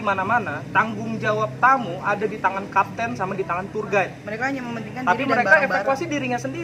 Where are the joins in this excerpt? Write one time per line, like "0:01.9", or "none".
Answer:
none

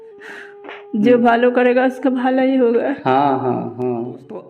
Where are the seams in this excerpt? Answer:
none

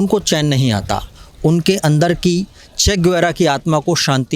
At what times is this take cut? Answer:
none

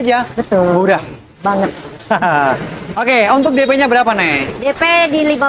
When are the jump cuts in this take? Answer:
none

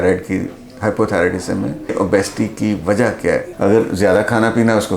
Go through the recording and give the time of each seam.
0:01.9
0:03.5

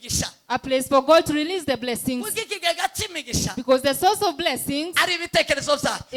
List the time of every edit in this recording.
none

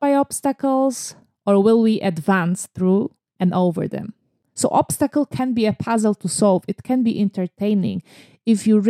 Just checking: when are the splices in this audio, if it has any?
0:04.4

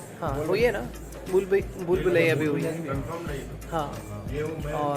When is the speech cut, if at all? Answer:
none

